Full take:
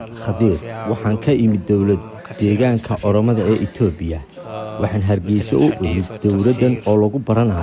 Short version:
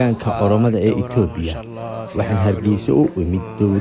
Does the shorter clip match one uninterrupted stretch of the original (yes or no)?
yes